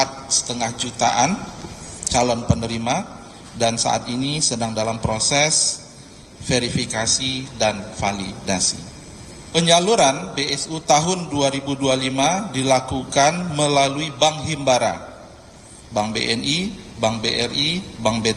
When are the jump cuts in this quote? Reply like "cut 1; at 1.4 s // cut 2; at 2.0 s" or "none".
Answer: cut 1; at 9.3 s